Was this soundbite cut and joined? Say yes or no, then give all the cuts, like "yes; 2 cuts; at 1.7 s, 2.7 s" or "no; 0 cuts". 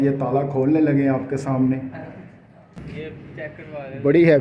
yes; 1 cut; at 2.8 s